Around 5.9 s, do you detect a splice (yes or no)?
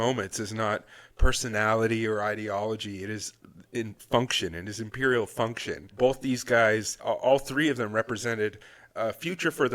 no